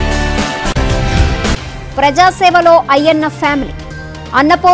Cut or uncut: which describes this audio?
uncut